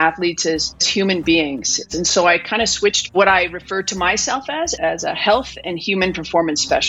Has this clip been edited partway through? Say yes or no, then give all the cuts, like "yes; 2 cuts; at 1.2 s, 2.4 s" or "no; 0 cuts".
yes; 4 cuts; at 0.9 s, 1.8 s, 3.1 s, 4.7 s